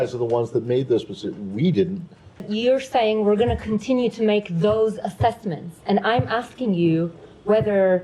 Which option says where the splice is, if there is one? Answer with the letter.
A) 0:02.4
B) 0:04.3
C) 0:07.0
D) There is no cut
A